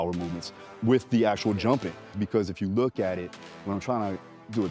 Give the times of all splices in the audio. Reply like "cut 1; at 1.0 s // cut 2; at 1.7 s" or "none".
cut 1; at 2.1 s // cut 2; at 3.5 s

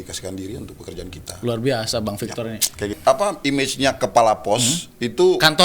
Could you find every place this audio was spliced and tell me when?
cut 1; at 3.0 s

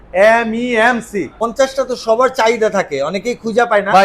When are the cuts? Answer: cut 1; at 1.4 s

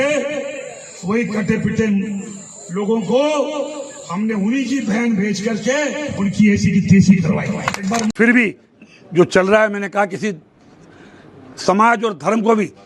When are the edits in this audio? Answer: cut 1; at 8.1 s

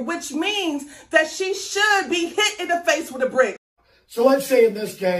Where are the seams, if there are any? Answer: cut 1; at 3.9 s

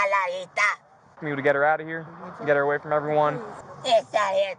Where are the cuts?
cut 1; at 1.1 s

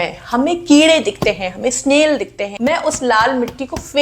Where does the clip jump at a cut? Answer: cut 1; at 2.4 s

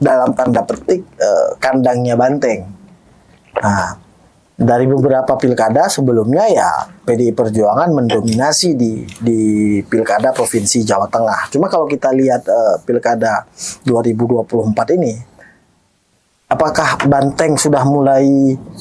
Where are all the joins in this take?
none

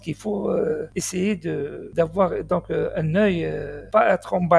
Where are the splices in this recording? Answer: cut 1; at 0.9 s // cut 2; at 1.8 s // cut 3; at 3.8 s

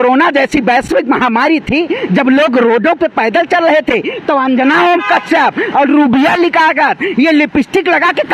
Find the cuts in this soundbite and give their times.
none

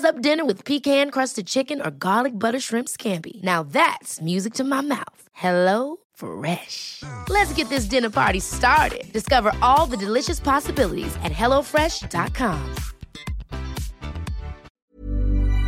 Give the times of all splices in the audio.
cut 1; at 14.8 s

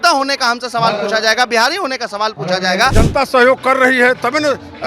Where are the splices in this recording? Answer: cut 1; at 2.9 s

